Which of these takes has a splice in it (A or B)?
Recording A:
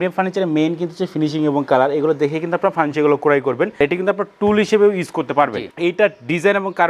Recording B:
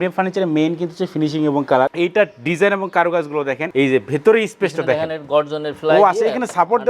B